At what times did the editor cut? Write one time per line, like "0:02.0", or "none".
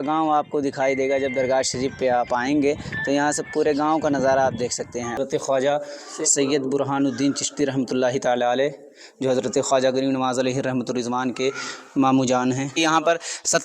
0:05.2
0:12.7